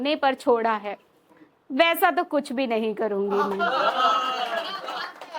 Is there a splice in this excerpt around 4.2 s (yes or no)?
no